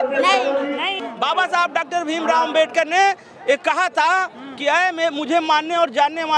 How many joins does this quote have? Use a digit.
1